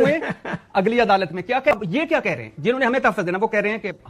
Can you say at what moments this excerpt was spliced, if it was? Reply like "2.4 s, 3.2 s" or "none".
1.7 s